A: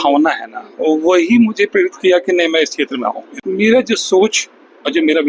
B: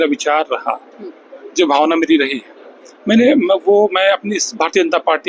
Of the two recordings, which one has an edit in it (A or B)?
A